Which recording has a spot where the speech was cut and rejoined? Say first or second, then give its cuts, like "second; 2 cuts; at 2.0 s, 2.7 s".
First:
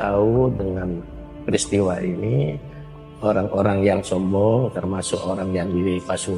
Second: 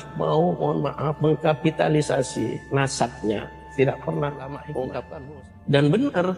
second; 2 cuts; at 1.1 s, 5.1 s